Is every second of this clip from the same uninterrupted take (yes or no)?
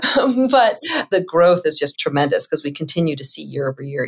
no